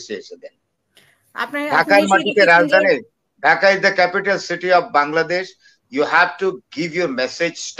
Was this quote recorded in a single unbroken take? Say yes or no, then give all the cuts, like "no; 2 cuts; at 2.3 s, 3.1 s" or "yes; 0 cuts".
yes; 0 cuts